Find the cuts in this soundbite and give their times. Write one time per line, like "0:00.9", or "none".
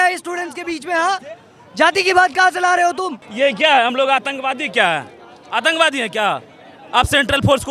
0:03.2